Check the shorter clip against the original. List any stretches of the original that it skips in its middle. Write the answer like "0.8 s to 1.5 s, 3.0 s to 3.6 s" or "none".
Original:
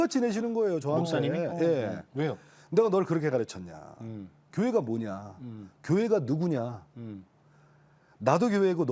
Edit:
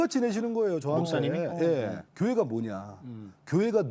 2.0 s to 4.4 s